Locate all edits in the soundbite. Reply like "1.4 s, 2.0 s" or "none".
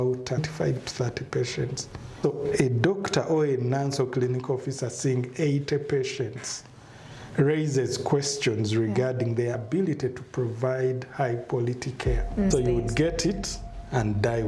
12.5 s